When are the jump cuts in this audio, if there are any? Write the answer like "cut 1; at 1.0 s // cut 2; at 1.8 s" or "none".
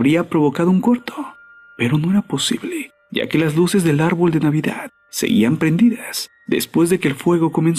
none

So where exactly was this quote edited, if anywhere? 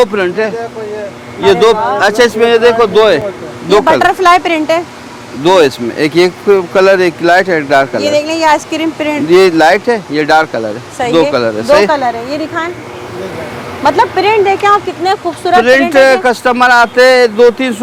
none

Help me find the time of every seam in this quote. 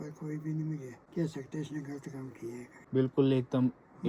cut 1; at 1.0 s // cut 2; at 2.8 s

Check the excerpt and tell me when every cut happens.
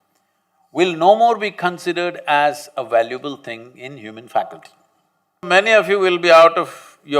cut 1; at 5.4 s

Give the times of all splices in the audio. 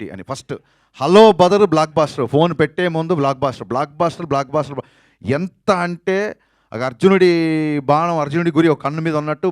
none

